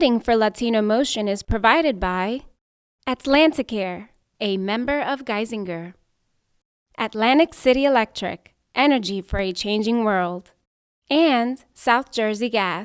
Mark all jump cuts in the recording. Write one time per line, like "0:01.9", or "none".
none